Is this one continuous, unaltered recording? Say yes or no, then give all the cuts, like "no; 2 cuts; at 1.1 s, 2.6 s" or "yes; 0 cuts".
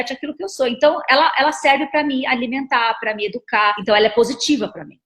no; 1 cut; at 3.8 s